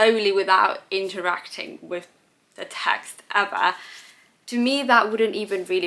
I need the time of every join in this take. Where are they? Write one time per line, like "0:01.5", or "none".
none